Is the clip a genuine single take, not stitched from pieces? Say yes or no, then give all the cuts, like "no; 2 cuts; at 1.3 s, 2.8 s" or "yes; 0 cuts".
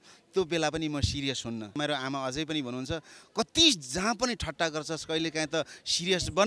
no; 1 cut; at 1.8 s